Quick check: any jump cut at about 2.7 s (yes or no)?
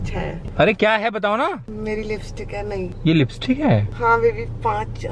no